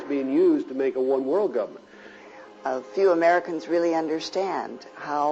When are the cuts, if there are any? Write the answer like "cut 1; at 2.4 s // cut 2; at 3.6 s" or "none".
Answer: cut 1; at 2.2 s